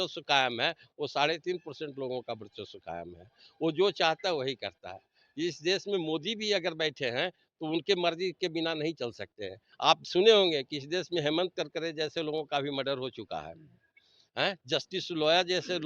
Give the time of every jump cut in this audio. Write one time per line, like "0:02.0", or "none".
0:09.7